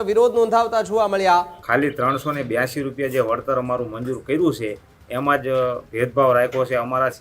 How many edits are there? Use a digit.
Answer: 1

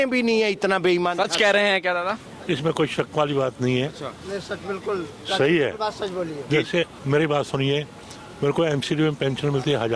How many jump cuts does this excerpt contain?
0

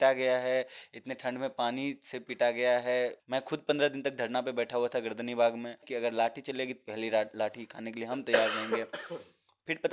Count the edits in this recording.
2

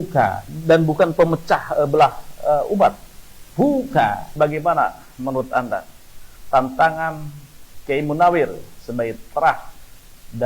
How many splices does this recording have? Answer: 1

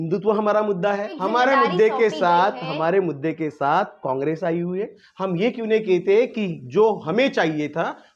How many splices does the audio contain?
2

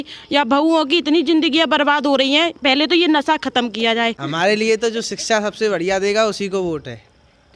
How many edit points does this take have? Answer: 1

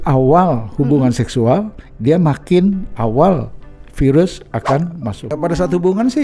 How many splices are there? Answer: 1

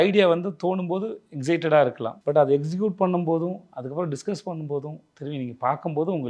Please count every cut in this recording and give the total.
1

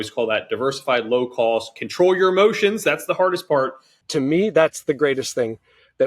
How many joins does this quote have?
1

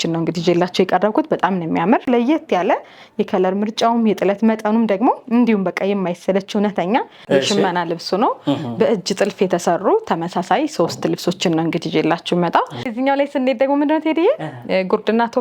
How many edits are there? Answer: 3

